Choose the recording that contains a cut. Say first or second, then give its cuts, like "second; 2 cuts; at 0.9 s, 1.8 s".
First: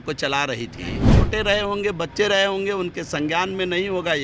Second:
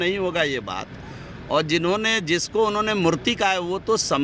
first; 1 cut; at 1.1 s